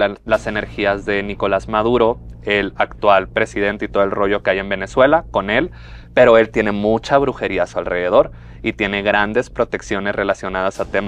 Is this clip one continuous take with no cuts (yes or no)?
yes